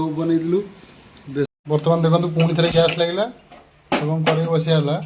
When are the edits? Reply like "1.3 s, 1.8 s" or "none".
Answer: 1.5 s